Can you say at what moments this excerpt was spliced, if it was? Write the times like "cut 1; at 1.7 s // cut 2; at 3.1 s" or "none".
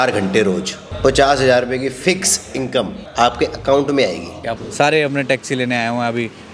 cut 1; at 4.5 s